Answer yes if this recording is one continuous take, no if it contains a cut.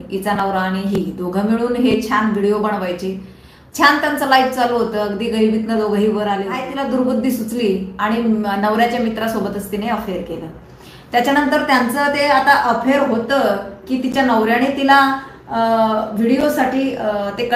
no